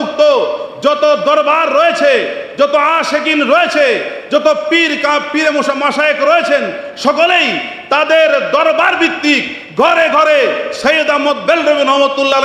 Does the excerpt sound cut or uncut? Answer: uncut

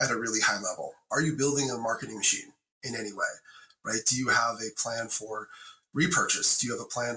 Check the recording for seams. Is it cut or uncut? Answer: cut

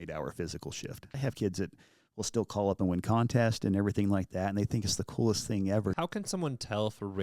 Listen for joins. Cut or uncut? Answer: cut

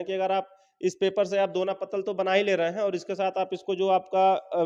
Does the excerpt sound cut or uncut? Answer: uncut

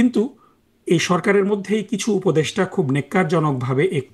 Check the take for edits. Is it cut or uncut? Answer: uncut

